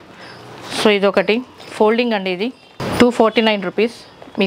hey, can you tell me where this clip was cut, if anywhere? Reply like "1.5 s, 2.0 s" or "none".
none